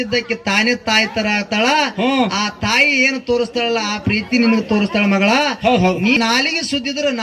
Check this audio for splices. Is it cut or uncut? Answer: cut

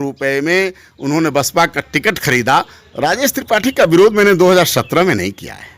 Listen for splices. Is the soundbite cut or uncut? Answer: cut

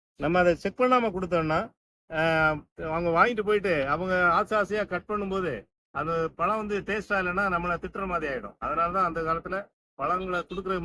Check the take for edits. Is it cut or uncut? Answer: uncut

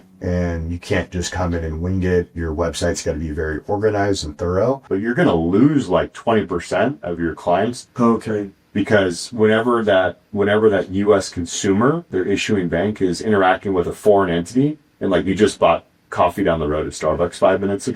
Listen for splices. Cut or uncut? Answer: cut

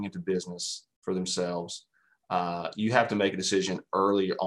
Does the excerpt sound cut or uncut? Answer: uncut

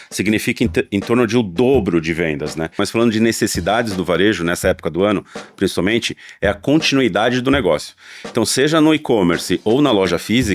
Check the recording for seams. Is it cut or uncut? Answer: cut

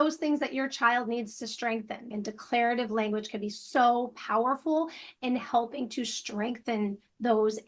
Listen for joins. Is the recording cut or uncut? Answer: cut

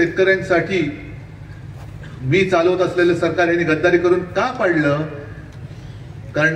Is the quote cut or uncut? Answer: uncut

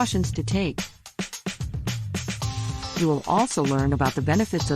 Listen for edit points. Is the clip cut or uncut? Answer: uncut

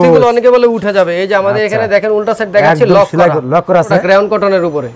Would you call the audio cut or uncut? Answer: cut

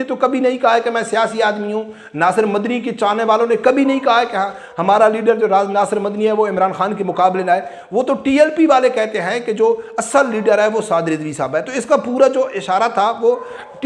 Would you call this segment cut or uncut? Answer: uncut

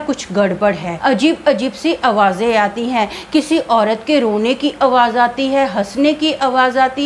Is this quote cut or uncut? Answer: cut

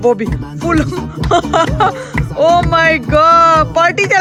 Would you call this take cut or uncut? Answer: uncut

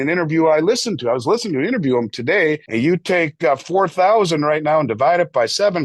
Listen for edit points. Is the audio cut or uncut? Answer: cut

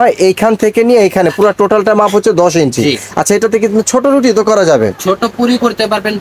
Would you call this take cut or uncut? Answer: uncut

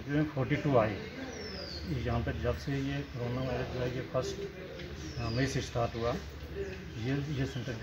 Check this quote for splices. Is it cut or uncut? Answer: uncut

